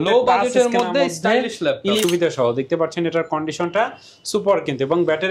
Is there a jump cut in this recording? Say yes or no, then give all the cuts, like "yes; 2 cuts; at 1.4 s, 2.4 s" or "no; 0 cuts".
yes; 1 cut; at 2.0 s